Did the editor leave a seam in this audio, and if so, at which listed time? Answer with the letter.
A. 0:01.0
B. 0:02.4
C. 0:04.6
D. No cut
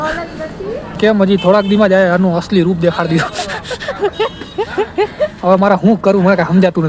A